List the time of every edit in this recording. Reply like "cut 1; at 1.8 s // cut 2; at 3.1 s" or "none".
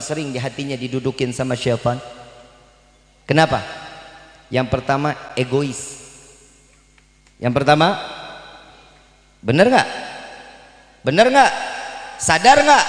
none